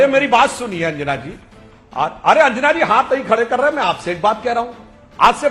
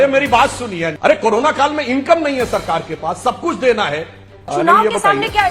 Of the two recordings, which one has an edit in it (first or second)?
second